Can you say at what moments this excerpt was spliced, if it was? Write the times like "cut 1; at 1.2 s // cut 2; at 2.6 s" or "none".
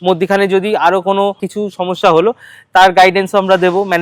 cut 1; at 1.5 s